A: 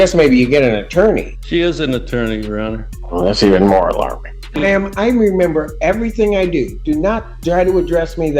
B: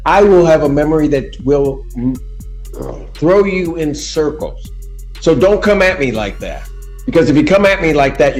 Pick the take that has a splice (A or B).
A